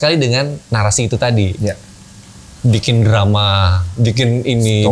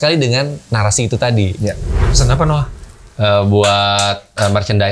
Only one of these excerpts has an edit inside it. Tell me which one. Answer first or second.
second